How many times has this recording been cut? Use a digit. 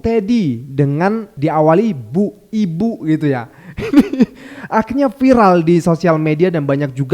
1